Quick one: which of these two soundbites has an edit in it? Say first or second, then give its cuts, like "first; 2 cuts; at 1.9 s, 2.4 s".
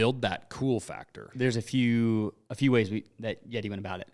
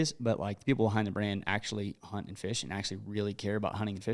first; 1 cut; at 1.3 s